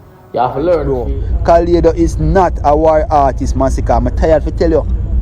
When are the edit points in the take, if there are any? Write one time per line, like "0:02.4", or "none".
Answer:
0:00.9